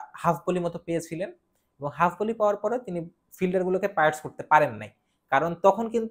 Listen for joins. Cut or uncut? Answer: uncut